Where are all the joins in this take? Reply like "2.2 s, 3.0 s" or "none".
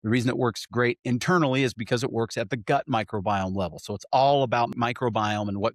4.7 s

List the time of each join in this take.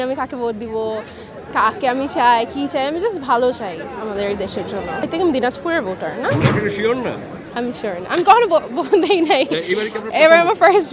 none

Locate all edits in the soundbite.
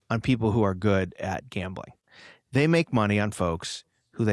1.9 s

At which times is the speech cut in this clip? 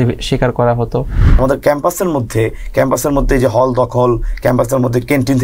1.3 s

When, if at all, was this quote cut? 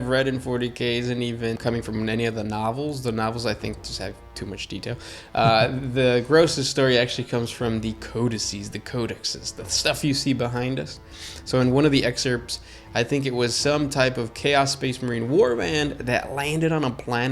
1.6 s

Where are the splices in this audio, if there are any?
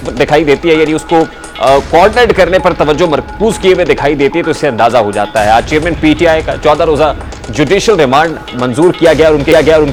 none

